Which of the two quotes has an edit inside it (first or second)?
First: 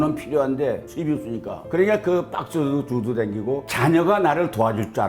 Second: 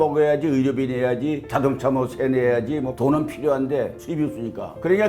first